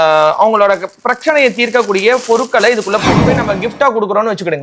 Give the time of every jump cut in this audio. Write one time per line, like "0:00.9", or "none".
0:03.3